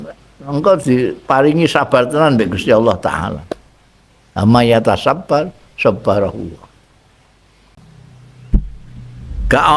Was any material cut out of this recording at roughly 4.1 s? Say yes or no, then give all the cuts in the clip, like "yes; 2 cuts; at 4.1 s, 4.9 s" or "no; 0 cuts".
no; 1 cut; at 7.8 s